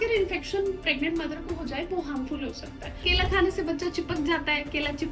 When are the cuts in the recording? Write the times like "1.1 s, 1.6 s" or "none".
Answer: 3.0 s

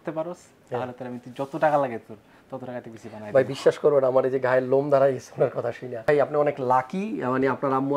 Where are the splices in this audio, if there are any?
5.9 s

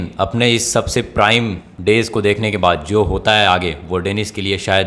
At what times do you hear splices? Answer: none

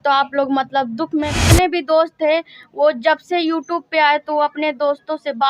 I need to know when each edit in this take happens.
1.4 s

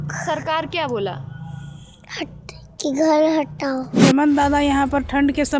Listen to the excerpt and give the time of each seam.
4.0 s

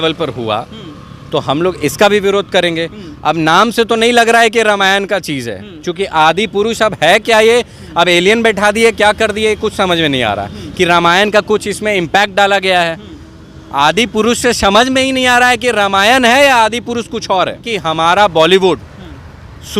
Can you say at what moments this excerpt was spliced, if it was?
17.7 s

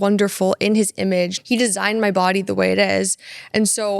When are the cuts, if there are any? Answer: 1.4 s

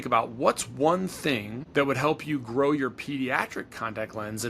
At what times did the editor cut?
1.6 s

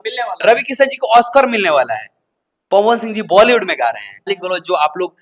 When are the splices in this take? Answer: 4.3 s

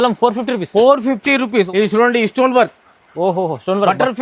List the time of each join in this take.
1.7 s

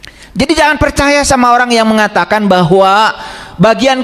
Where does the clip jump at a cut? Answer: none

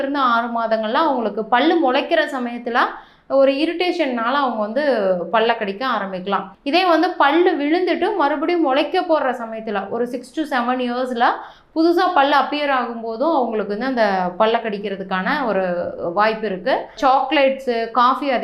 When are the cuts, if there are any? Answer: none

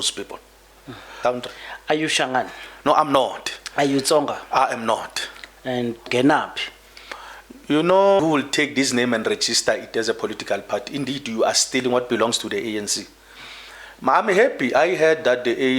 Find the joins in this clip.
1.1 s, 6.1 s, 8.2 s

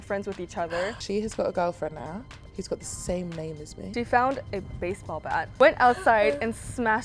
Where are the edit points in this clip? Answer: 1.0 s, 2.3 s, 3.7 s, 5.5 s

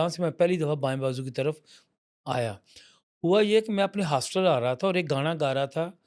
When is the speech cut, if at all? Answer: none

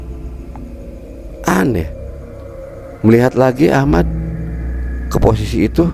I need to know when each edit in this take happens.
1.0 s

